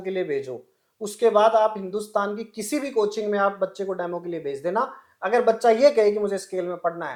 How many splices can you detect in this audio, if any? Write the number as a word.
zero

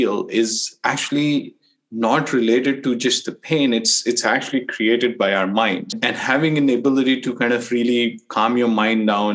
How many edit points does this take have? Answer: one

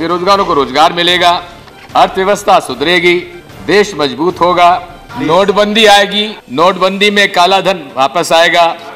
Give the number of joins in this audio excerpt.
zero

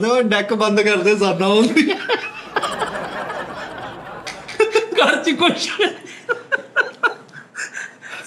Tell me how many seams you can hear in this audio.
zero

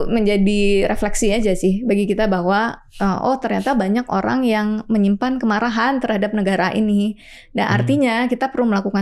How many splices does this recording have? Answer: zero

